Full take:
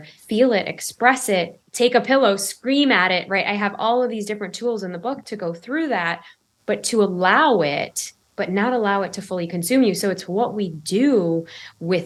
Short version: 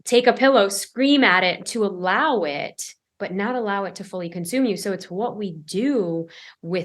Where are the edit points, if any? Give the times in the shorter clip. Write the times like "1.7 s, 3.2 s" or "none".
1.6 s